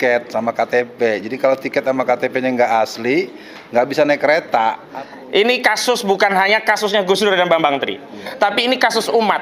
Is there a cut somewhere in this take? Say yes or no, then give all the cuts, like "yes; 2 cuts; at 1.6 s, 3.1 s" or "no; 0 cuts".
yes; 1 cut; at 4.9 s